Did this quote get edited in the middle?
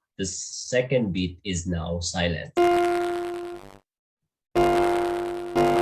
no; 0 cuts

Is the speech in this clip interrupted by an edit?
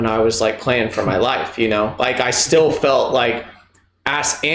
no; 0 cuts

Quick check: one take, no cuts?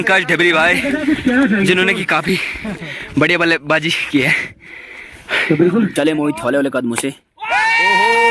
no; 1 cut; at 5.9 s

